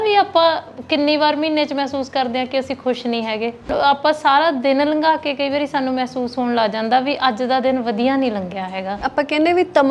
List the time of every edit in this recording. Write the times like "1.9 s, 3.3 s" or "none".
3.7 s, 9.0 s